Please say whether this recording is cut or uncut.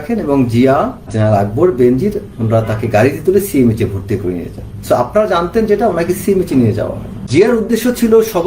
cut